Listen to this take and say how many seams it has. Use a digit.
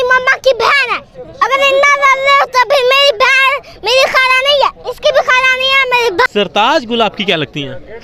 2